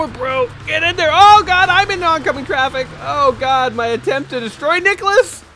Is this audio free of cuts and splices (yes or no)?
yes